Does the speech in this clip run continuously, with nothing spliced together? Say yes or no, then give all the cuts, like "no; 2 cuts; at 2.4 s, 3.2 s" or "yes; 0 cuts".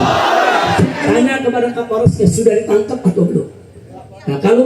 no; 1 cut; at 1.0 s